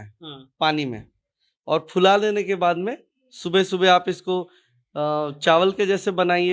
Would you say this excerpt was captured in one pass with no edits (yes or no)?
yes